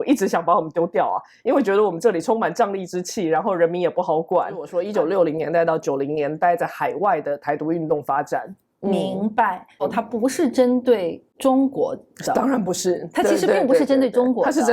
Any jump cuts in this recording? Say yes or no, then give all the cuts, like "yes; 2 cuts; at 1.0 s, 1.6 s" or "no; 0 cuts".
yes; 3 cuts; at 4.8 s, 9.8 s, 11.2 s